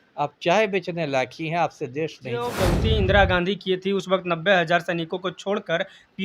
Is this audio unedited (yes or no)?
no